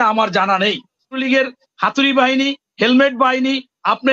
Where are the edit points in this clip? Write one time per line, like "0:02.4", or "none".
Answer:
0:01.2

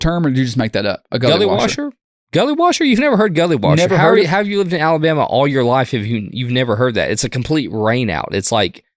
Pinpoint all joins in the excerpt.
none

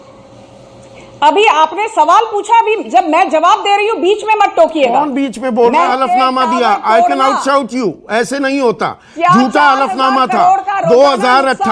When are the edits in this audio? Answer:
0:05.9

